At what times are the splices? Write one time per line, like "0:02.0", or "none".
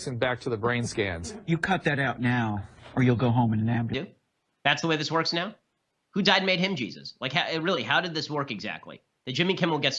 none